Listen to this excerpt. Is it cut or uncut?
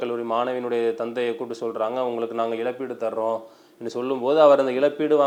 uncut